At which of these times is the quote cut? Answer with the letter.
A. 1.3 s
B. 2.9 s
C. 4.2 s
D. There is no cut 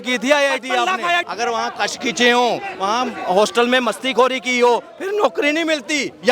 A